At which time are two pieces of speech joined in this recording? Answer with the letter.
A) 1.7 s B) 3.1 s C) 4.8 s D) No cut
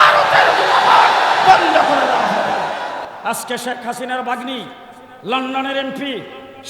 B